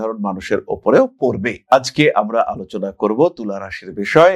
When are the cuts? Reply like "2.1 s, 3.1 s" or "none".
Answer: none